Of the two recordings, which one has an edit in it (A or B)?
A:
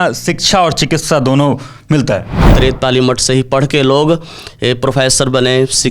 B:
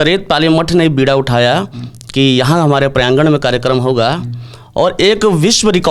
A